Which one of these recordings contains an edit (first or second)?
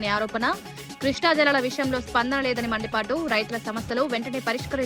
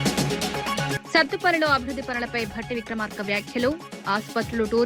second